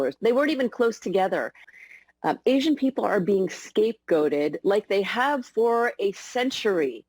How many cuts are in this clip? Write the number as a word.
one